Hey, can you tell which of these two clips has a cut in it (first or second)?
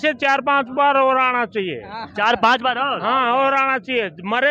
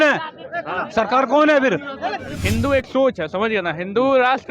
second